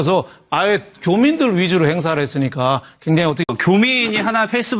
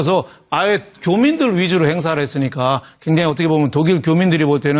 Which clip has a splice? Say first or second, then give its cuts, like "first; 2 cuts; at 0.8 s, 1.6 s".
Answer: second; 1 cut; at 3.4 s